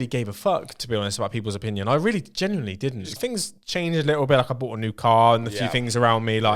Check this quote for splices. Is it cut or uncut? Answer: cut